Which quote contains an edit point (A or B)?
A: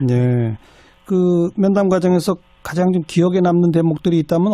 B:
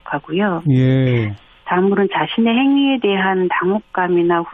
A